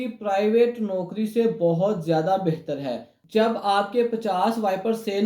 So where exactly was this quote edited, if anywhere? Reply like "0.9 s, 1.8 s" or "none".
3.1 s